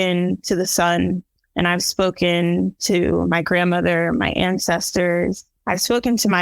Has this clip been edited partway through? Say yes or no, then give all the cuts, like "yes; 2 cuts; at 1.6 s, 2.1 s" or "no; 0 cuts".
yes; 2 cuts; at 1.4 s, 5.5 s